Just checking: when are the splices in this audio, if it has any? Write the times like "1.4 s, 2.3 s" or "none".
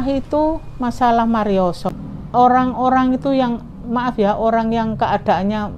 1.8 s